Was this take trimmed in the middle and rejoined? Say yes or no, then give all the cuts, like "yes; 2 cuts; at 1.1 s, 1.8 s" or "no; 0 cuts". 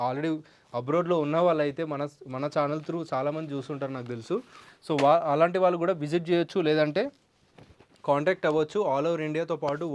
no; 0 cuts